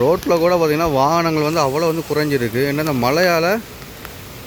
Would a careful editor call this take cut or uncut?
uncut